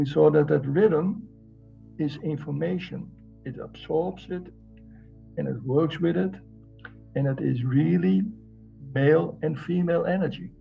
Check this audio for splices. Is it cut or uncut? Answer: uncut